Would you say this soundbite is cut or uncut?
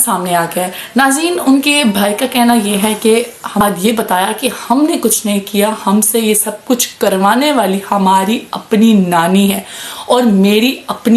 cut